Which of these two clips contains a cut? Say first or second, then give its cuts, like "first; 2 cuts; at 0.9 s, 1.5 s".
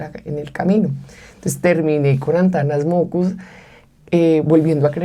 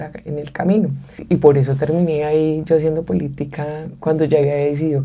second; 1 cut; at 1.2 s